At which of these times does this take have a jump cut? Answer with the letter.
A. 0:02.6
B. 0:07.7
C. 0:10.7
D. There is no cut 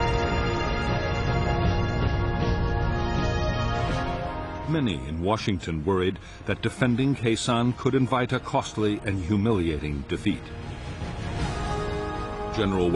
A